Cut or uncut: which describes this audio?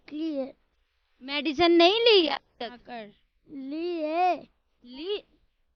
uncut